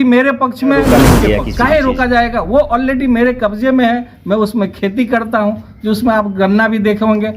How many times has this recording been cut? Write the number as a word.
one